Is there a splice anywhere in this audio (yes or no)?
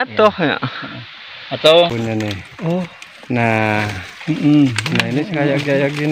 yes